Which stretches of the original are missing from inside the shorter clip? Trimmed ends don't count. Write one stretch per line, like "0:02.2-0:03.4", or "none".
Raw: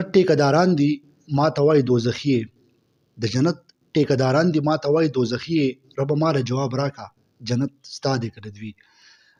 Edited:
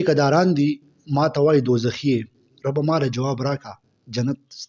0:02.7-0:05.8